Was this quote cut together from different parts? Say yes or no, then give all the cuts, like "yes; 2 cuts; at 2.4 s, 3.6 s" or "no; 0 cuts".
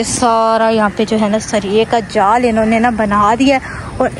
no; 0 cuts